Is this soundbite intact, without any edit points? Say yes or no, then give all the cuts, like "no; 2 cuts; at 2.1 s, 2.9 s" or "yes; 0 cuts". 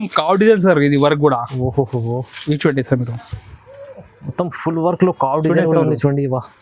yes; 0 cuts